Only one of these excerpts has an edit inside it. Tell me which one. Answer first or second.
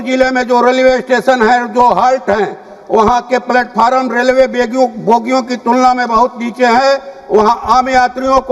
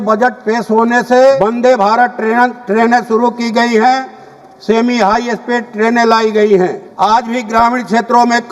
second